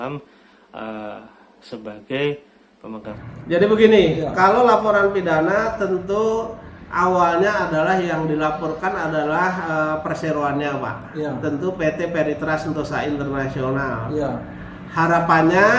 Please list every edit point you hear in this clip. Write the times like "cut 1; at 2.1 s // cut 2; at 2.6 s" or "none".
cut 1; at 3.1 s